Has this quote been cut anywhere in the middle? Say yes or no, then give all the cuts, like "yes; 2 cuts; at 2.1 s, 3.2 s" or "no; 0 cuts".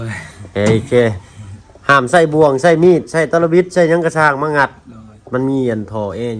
no; 0 cuts